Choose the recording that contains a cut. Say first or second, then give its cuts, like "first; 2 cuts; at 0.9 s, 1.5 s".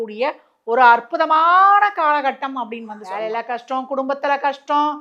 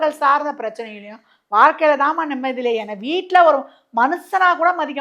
first; 1 cut; at 3.0 s